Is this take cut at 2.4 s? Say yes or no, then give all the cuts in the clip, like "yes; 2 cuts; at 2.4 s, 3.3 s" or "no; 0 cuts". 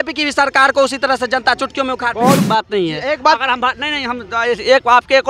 yes; 1 cut; at 2.4 s